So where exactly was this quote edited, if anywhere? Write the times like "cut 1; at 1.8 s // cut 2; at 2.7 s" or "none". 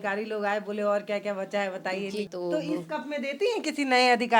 cut 1; at 2.3 s